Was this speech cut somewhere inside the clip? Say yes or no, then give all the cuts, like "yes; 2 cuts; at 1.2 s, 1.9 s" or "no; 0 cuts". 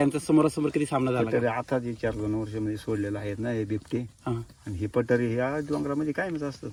no; 0 cuts